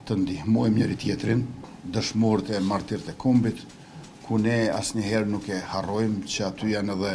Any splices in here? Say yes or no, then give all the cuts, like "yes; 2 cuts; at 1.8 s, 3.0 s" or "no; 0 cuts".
yes; 1 cut; at 1.7 s